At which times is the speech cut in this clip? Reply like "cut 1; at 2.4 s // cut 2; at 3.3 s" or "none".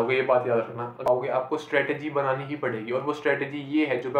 cut 1; at 1.1 s

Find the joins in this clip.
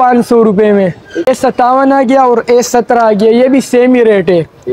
cut 1; at 1.3 s

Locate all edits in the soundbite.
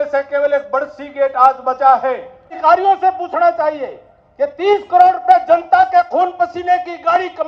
cut 1; at 2.5 s

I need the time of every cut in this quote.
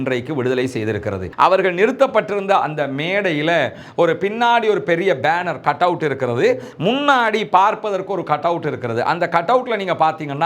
cut 1; at 1.2 s

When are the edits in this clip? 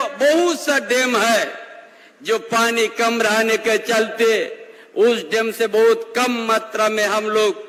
none

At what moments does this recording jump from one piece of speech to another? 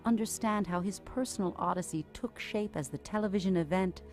cut 1; at 1.5 s

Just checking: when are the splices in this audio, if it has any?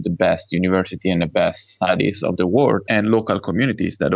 cut 1; at 2.8 s

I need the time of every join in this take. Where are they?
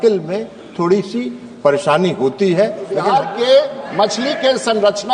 cut 1; at 3.1 s

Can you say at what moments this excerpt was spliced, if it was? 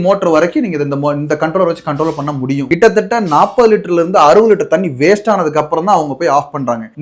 cut 1; at 2.6 s

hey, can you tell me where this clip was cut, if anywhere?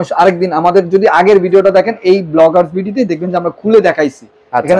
none

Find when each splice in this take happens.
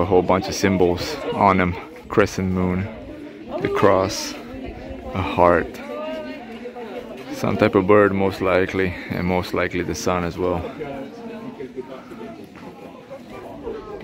none

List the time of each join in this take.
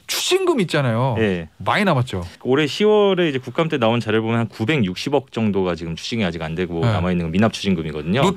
cut 1; at 2.3 s

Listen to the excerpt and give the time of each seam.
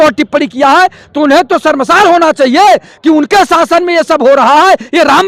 none

